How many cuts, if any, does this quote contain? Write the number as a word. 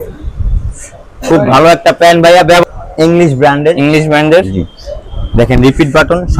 one